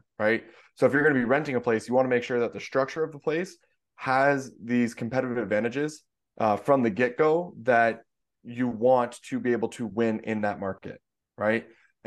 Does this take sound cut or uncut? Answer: uncut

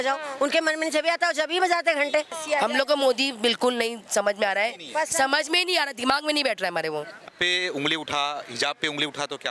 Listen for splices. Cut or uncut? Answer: cut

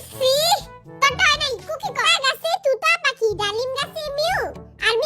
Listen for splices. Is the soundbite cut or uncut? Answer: cut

